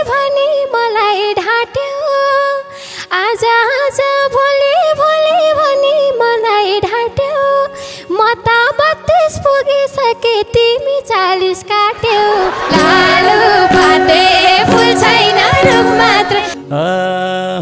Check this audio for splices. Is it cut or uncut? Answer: cut